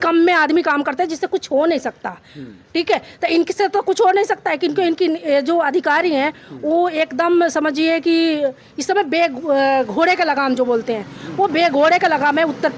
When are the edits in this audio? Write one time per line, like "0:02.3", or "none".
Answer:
none